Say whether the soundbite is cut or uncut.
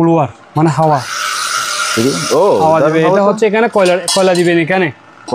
uncut